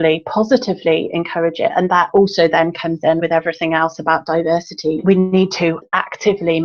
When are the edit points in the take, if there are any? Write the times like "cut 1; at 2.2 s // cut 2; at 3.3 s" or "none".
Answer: cut 1; at 2.1 s // cut 2; at 3.2 s // cut 3; at 5.0 s // cut 4; at 5.8 s